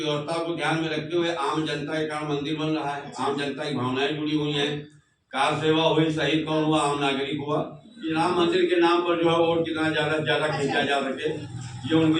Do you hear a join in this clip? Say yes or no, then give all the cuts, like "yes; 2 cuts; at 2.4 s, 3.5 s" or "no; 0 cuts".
yes; 1 cut; at 8.0 s